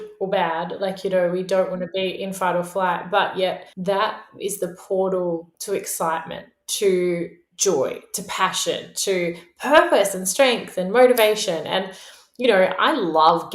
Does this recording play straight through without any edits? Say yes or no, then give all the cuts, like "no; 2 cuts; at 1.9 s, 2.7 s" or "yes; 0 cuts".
no; 1 cut; at 3.7 s